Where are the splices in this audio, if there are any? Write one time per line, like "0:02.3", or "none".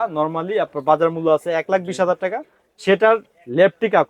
none